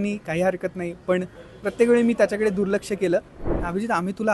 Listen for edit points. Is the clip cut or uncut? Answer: cut